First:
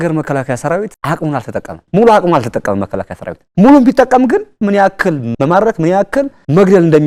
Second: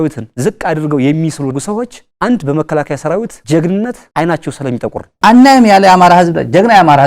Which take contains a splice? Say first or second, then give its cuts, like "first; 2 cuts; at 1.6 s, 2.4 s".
second; 2 cuts; at 3.4 s, 5.1 s